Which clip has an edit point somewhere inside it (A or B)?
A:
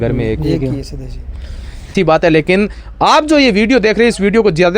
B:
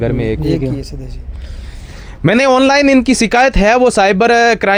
A